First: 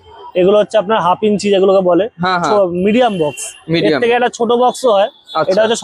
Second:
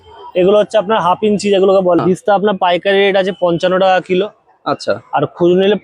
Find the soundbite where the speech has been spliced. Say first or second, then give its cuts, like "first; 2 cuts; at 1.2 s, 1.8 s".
second; 1 cut; at 2.0 s